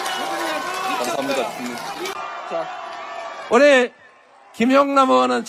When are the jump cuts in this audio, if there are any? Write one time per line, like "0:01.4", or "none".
0:02.1